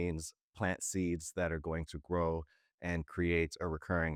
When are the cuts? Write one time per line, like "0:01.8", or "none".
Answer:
none